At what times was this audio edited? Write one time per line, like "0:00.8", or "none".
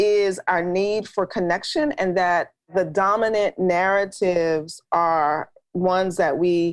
0:02.7

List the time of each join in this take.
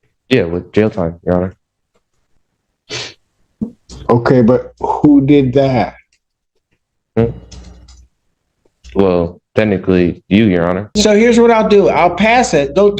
0:10.9

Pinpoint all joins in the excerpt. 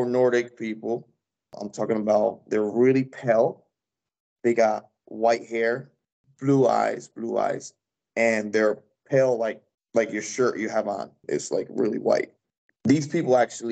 0:11.2
0:12.6

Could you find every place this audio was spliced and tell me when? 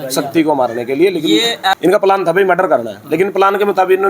0:01.8

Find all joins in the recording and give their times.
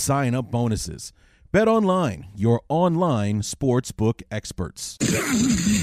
0:04.9

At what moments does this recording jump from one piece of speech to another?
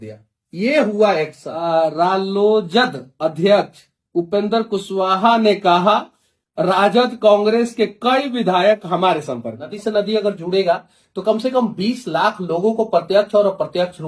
0:01.5
0:09.7

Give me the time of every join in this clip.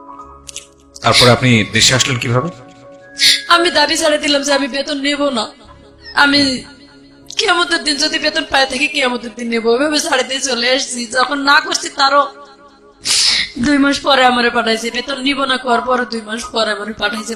none

